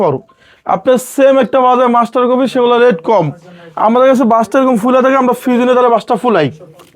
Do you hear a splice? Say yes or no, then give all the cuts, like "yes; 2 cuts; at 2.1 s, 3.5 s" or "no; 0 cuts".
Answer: no; 0 cuts